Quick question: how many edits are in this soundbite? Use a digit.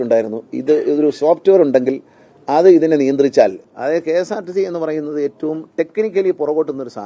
1